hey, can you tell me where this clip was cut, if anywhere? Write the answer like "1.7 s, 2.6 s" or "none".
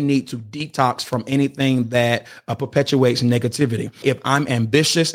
4.0 s